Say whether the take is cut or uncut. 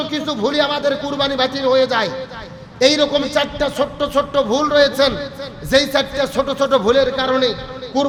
uncut